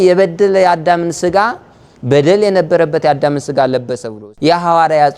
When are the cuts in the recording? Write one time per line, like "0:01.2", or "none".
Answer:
0:04.1